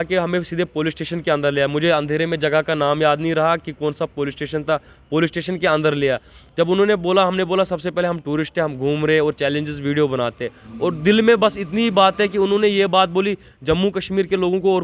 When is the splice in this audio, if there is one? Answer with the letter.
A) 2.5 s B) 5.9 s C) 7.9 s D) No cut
D